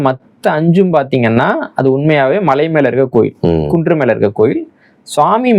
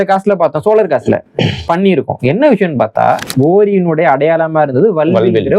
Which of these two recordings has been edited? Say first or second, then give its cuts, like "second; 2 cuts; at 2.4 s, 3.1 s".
second; 1 cut; at 3.3 s